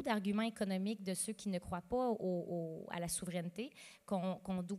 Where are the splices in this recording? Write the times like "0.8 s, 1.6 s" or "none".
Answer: none